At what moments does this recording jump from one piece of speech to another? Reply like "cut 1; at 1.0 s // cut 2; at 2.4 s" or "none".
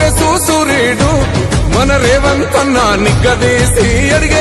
none

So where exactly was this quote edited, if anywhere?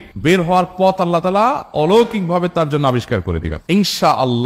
cut 1; at 3.5 s

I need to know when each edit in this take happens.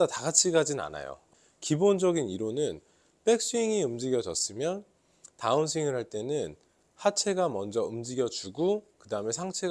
cut 1; at 1.3 s

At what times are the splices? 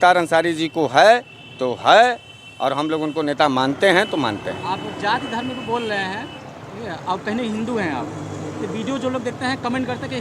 none

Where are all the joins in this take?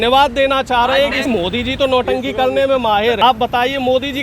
cut 1; at 1.3 s // cut 2; at 3.2 s

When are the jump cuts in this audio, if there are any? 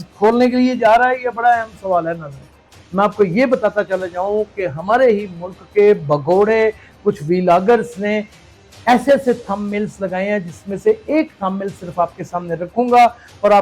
cut 1; at 2.8 s

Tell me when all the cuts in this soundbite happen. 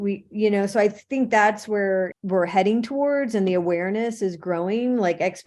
cut 1; at 2.2 s

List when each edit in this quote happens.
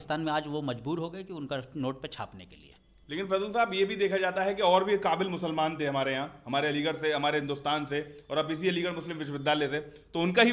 none

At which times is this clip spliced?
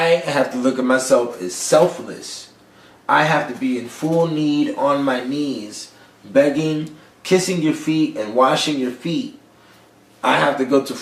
cut 1; at 10.0 s

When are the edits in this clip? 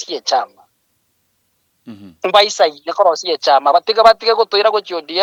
none

